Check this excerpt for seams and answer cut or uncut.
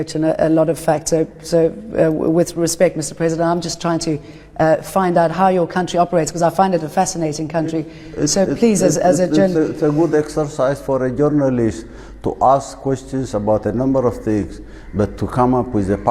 uncut